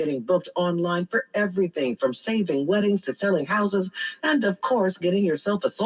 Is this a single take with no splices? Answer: yes; 0 cuts

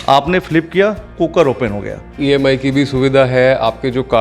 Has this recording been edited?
yes; 1 cut; at 2.2 s

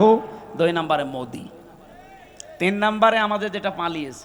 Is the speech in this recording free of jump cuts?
yes; 0 cuts

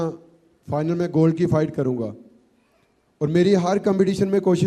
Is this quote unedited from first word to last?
yes; 0 cuts

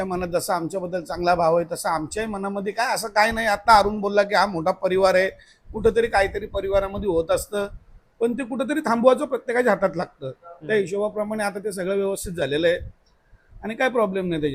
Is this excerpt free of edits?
yes; 0 cuts

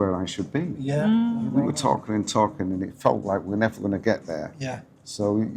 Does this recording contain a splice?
yes; 1 cut; at 1.5 s

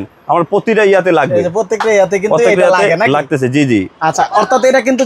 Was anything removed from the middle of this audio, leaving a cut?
no; 0 cuts

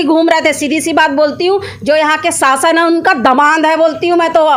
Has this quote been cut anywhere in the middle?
no; 0 cuts

